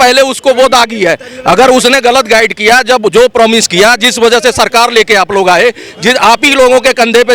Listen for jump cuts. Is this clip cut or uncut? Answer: uncut